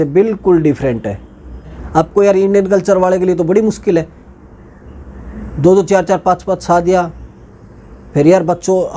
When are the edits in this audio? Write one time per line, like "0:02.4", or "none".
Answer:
0:01.8